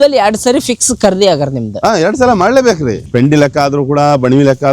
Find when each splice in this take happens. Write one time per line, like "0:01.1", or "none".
0:03.1